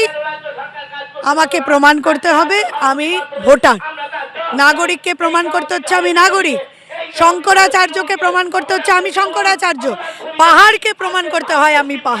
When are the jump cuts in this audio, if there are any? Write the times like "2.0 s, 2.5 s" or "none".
none